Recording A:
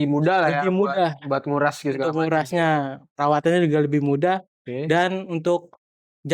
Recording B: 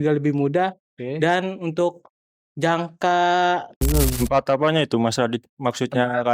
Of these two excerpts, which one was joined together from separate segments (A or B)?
B